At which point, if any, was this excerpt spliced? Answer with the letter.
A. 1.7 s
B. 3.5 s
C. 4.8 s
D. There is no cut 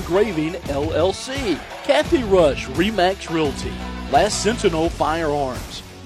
A